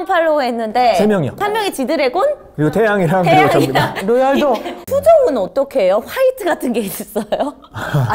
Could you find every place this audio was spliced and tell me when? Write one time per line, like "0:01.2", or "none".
0:01.4
0:04.8